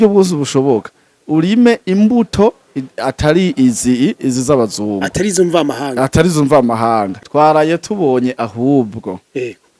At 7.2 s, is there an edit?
yes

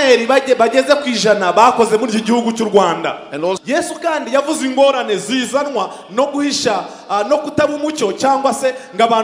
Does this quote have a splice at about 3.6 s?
yes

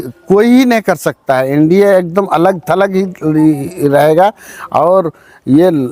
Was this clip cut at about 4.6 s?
no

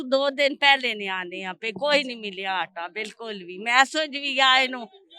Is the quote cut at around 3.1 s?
no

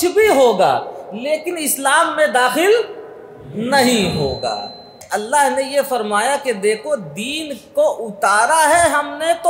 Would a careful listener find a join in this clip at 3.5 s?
no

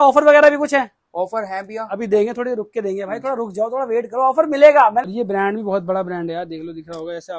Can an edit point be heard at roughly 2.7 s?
no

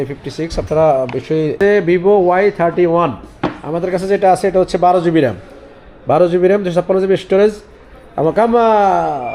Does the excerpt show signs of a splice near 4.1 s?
no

